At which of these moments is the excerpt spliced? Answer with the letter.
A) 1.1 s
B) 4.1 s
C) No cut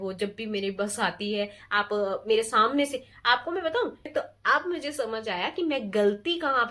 B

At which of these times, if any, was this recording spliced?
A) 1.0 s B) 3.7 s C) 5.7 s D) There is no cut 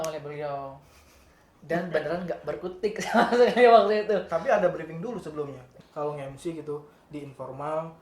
C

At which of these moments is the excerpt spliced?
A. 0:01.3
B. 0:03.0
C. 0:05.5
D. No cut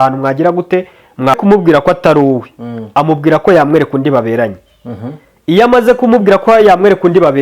A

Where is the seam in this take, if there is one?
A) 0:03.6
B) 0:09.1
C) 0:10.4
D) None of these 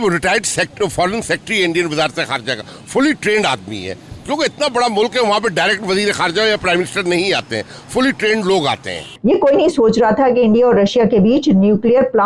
B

